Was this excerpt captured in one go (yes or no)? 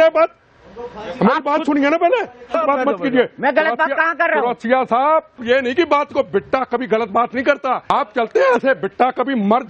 no